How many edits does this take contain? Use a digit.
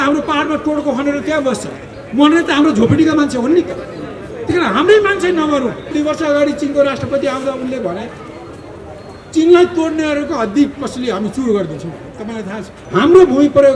2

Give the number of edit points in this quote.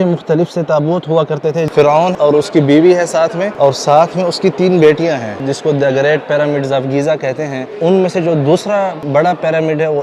5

